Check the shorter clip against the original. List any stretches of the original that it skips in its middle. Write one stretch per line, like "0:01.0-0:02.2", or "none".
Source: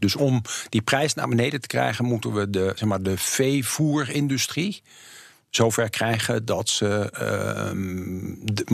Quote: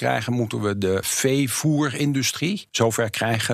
0:02.8-0:03.2
0:04.8-0:05.5